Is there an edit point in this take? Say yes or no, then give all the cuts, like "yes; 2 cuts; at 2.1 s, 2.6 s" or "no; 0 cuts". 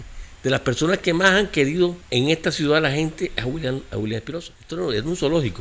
yes; 1 cut; at 4.6 s